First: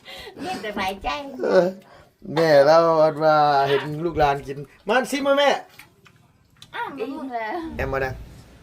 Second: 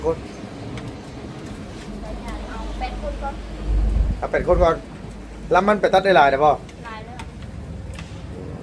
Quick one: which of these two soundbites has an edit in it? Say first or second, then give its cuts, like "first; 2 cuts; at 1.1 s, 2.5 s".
first; 1 cut; at 7.7 s